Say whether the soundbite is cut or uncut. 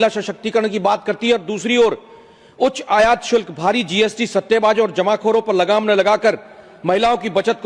uncut